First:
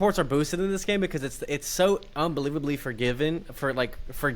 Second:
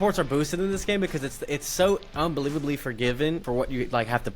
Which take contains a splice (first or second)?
second